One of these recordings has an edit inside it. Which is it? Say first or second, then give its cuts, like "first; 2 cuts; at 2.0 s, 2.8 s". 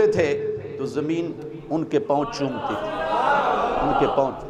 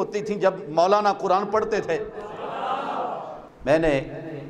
second; 1 cut; at 3.5 s